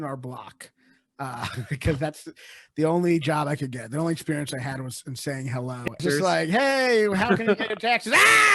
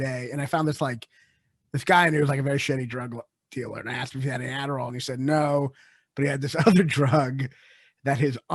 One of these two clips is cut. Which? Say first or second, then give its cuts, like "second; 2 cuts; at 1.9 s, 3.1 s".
first; 1 cut; at 6.0 s